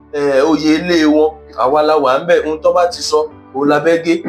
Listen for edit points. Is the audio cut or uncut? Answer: uncut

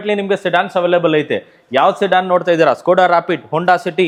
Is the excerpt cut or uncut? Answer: uncut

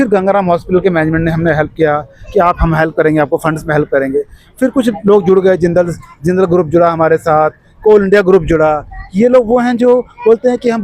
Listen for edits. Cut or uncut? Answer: uncut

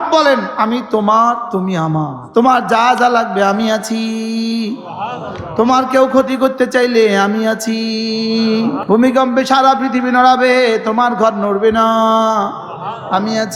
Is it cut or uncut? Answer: cut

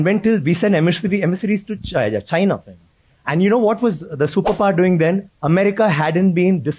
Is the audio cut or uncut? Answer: uncut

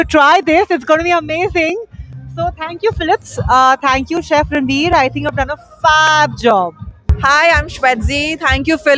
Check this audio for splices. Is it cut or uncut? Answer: uncut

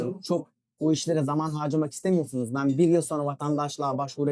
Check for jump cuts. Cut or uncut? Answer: uncut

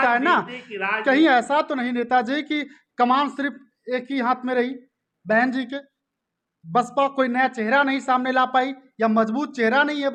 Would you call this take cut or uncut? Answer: uncut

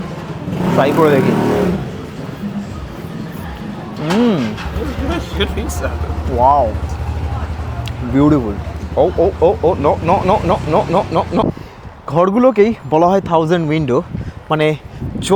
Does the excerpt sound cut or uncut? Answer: cut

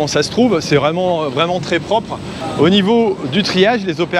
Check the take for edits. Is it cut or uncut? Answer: cut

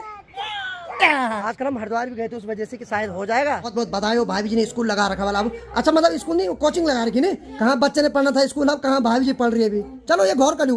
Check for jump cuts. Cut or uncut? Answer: cut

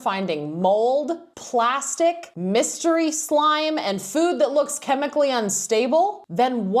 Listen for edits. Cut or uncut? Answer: cut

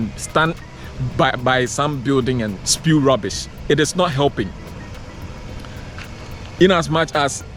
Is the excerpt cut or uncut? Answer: uncut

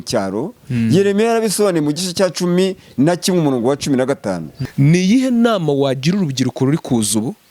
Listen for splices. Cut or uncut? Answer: cut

